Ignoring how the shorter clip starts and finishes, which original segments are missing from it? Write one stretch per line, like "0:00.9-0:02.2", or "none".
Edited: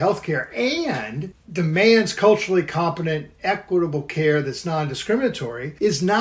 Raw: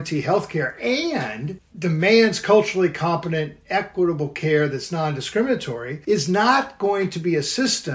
none